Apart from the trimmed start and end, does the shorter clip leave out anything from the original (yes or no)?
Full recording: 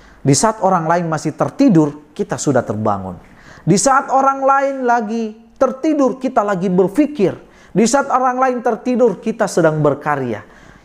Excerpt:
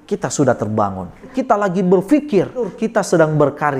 yes